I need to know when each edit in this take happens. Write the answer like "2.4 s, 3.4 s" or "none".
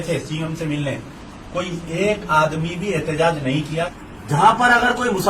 4.0 s